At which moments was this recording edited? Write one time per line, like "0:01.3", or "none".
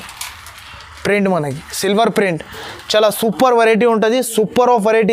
none